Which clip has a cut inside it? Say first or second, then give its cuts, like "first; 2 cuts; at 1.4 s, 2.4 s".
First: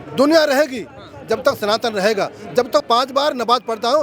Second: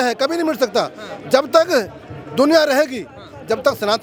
first; 1 cut; at 2.8 s